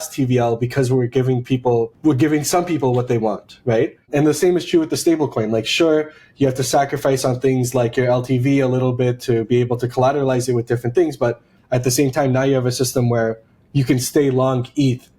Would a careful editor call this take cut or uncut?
cut